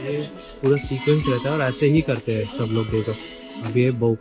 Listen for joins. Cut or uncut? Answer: uncut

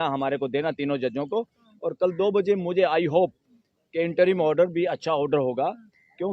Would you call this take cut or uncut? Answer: uncut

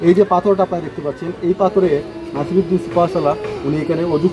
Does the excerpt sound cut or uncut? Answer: uncut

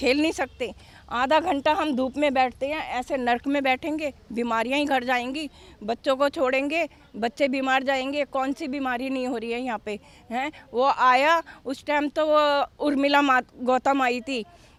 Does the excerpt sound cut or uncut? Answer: uncut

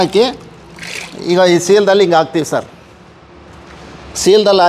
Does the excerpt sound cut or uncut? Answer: uncut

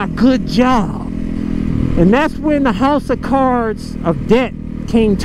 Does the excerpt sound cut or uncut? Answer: uncut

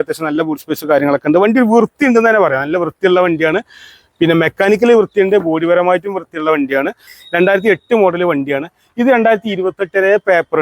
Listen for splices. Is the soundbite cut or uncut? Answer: cut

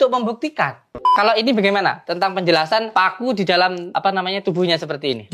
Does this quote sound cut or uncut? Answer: cut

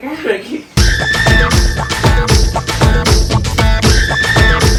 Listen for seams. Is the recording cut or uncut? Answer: uncut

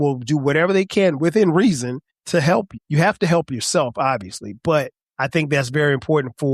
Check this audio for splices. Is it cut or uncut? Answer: cut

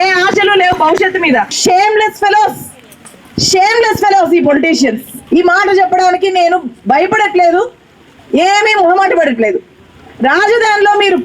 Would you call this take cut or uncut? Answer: cut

